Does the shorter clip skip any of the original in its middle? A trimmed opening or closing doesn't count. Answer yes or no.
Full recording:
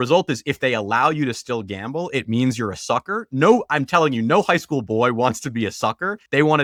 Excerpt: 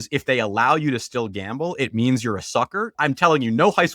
yes